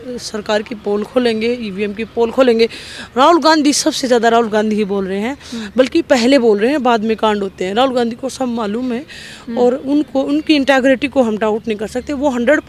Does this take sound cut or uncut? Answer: uncut